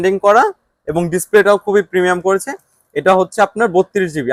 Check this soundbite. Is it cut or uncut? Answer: uncut